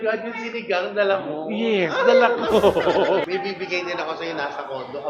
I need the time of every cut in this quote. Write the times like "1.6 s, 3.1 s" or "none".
3.2 s